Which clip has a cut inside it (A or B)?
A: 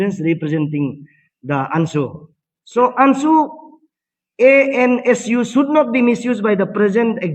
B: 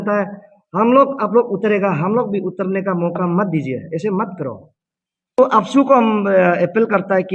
B